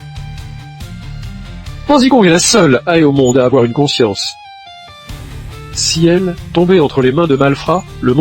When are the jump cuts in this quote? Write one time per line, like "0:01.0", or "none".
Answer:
0:01.8